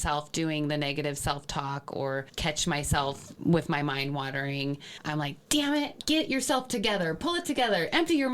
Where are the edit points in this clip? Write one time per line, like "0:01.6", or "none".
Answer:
0:05.9